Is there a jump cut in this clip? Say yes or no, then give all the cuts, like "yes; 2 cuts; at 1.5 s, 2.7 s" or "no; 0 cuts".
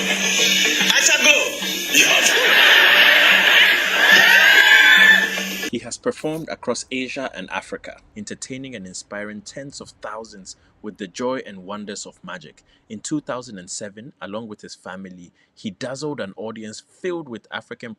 no; 0 cuts